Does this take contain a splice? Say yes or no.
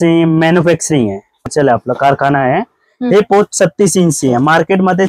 yes